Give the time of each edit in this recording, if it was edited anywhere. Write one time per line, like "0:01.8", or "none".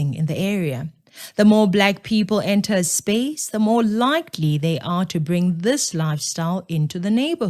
0:01.9